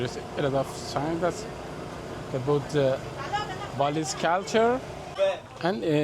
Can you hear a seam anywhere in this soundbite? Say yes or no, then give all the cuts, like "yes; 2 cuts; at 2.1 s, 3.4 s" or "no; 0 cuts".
yes; 1 cut; at 5.0 s